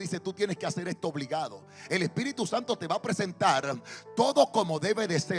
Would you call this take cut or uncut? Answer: uncut